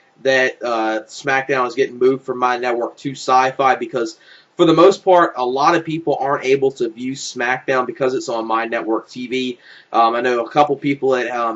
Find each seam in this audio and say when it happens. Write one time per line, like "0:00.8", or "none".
0:06.7